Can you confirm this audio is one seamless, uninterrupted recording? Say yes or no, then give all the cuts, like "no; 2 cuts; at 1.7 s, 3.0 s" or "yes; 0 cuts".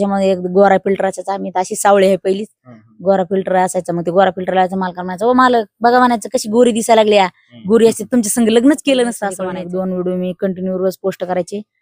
no; 1 cut; at 9.3 s